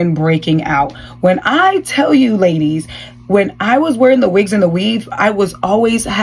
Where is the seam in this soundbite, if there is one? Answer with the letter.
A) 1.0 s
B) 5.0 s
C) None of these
C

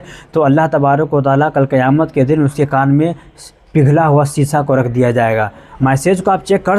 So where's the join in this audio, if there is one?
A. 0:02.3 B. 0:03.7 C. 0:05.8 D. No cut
C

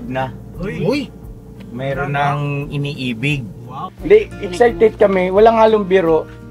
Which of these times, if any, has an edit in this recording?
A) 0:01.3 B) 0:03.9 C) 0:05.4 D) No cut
B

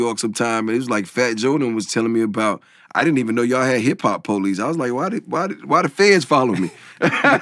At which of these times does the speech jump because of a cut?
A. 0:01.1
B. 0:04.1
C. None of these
C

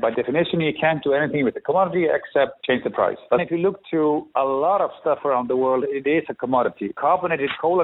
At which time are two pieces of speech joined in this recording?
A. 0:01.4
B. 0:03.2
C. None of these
C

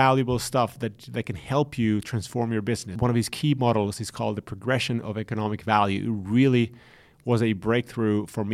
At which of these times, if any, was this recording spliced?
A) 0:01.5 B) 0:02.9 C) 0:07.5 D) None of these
B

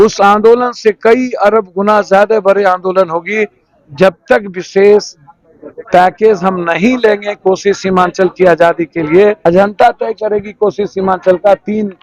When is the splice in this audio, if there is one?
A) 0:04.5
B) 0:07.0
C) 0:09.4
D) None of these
C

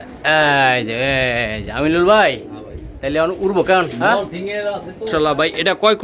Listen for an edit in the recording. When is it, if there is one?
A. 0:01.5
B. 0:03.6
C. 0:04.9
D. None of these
C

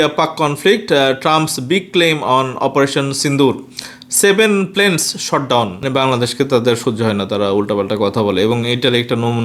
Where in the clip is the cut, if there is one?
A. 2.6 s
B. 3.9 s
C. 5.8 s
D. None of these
C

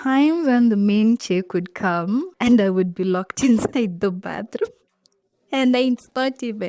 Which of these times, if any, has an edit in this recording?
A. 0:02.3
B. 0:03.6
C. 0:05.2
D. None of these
A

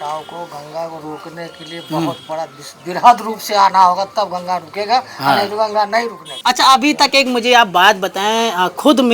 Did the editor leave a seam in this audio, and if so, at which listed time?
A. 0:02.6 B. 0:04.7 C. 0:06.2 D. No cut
C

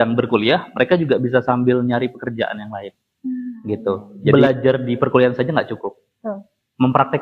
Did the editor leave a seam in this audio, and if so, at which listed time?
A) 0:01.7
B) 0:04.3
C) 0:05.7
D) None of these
B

